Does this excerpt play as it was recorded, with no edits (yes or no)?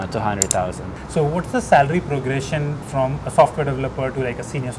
no